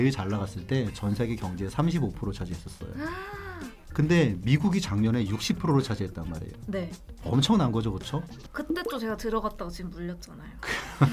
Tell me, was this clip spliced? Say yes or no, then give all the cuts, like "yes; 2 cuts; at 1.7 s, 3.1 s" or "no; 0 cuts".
no; 0 cuts